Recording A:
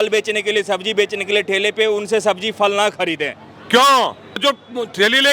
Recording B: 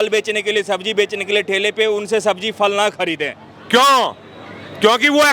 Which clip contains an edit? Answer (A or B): A